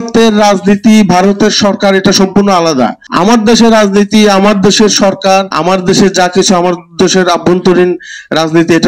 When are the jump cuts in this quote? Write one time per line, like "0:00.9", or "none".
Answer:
0:03.0
0:05.5